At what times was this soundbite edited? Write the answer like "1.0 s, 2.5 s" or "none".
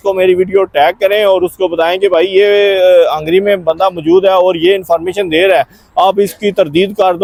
none